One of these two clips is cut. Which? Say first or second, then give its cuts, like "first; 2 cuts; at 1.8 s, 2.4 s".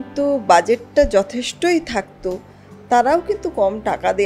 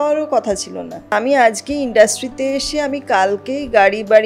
second; 1 cut; at 1.1 s